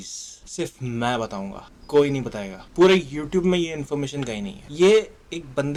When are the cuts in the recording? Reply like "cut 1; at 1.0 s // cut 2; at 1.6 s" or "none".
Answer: none